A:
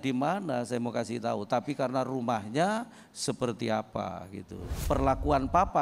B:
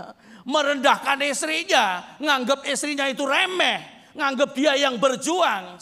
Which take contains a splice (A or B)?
A